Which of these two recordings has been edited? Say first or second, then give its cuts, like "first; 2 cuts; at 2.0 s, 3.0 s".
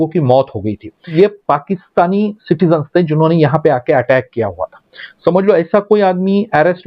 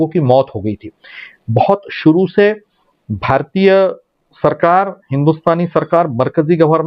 first; 1 cut; at 1.1 s